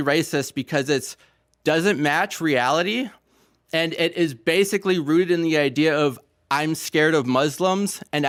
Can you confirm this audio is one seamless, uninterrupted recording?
yes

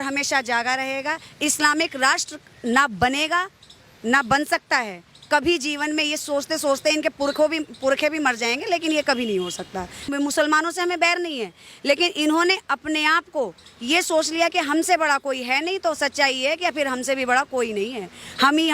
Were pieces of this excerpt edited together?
yes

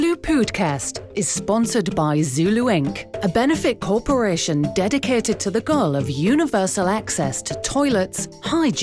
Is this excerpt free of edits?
yes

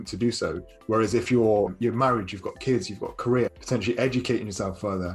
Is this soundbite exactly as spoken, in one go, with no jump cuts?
no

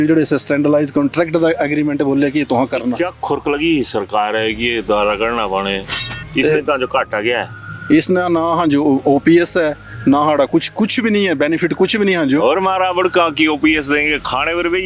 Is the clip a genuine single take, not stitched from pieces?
yes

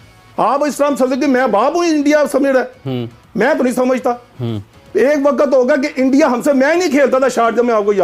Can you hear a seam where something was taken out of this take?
no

